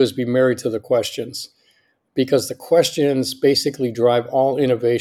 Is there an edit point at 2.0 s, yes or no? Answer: yes